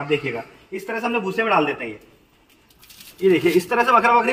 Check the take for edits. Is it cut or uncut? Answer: cut